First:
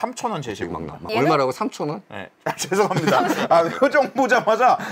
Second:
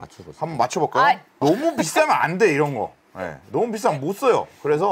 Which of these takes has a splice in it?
first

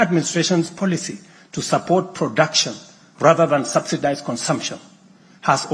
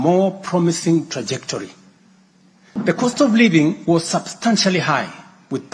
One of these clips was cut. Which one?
second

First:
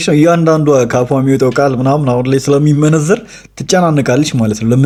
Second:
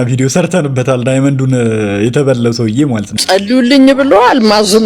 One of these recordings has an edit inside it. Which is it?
second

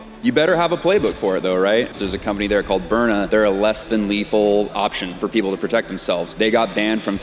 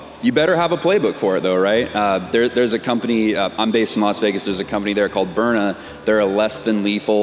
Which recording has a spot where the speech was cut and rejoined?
first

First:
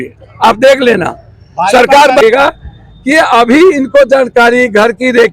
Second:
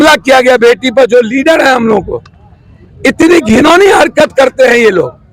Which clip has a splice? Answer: first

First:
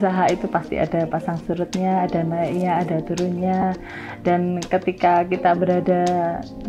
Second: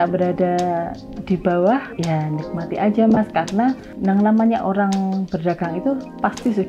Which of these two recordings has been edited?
second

